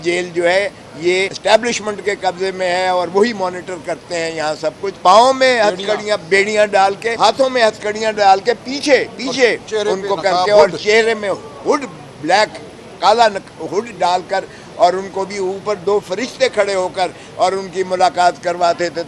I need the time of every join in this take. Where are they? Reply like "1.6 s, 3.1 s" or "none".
1.3 s, 4.9 s, 7.1 s

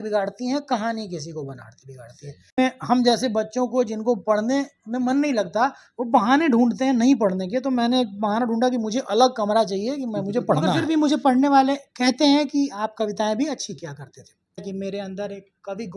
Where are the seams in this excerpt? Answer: 2.6 s, 10.8 s, 14.7 s

